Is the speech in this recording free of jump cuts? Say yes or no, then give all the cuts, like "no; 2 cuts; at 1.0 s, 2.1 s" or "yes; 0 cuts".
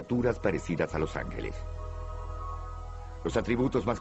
yes; 0 cuts